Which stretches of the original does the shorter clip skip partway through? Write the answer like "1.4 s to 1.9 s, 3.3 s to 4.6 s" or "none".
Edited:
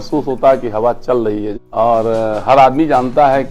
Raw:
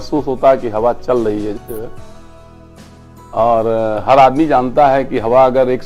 1.6 s to 3.2 s

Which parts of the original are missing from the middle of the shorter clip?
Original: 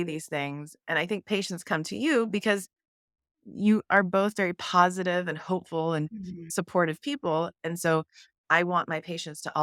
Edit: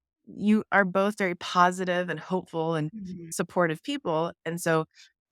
none

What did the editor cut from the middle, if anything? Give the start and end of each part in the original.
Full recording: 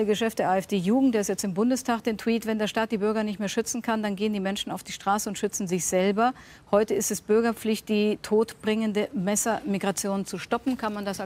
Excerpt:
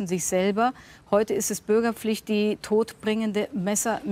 none

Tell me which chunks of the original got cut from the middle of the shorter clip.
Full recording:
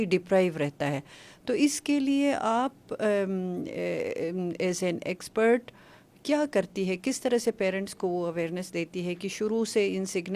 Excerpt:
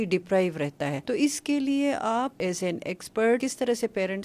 1.0 s to 1.4 s, 2.8 s to 4.6 s, 5.6 s to 7.0 s

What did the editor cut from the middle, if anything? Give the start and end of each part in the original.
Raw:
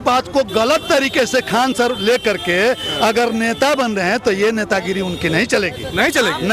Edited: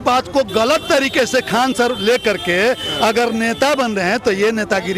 none

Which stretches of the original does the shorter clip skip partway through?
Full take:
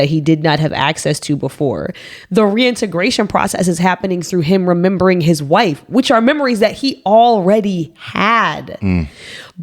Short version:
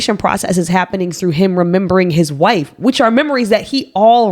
none

